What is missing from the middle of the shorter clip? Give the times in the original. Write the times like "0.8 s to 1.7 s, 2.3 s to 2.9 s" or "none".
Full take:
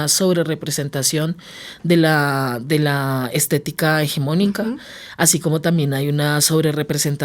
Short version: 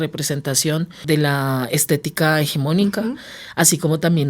1.5 s to 2.6 s